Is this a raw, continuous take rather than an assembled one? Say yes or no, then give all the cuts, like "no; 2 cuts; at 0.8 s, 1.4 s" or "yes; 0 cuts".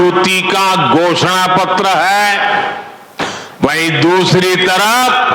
yes; 0 cuts